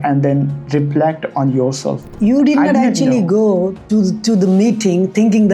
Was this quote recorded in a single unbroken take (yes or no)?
no